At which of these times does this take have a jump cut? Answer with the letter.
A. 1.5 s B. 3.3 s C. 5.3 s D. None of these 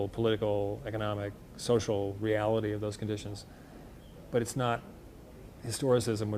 B